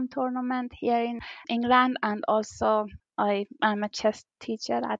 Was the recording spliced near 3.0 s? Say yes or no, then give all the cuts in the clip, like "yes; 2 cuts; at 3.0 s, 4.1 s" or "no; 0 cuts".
yes; 2 cuts; at 1.4 s, 3.0 s